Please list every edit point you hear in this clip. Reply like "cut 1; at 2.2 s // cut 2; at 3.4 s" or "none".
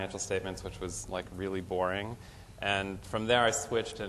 cut 1; at 1.0 s